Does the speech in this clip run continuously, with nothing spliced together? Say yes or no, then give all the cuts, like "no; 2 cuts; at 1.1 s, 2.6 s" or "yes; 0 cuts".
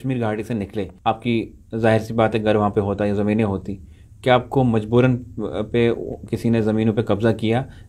no; 1 cut; at 0.9 s